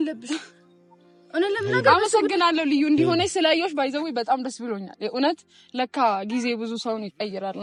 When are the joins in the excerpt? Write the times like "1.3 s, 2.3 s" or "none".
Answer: none